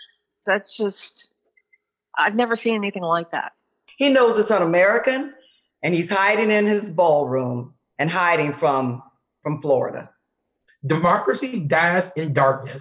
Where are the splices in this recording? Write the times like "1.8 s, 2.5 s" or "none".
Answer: 3.8 s, 10.6 s